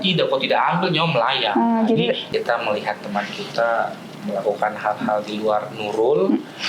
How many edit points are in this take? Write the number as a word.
one